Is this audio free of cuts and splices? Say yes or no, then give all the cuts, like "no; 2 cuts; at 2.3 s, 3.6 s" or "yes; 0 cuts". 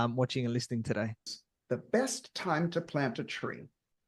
no; 1 cut; at 1.4 s